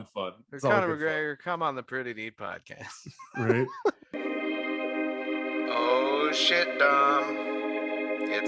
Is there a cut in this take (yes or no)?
yes